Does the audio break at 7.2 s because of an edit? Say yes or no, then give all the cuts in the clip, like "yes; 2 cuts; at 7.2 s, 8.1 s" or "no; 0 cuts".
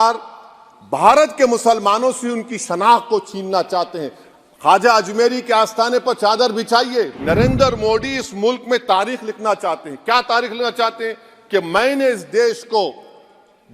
yes; 1 cut; at 7.2 s